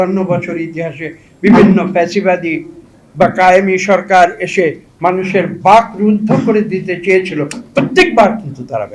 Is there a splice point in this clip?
no; 0 cuts

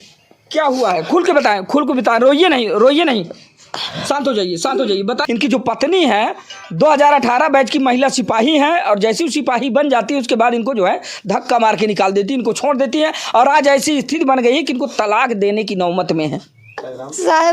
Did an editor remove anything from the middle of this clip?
yes; 2 cuts; at 5.2 s, 16.8 s

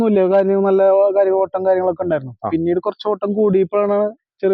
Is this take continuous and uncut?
yes; 0 cuts

